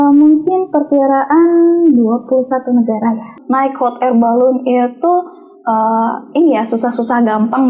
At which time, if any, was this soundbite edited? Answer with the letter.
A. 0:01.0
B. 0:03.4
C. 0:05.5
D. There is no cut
B